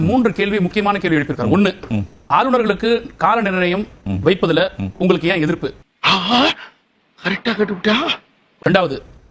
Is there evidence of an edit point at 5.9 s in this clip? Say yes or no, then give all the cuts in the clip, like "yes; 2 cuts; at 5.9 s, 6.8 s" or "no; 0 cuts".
no; 0 cuts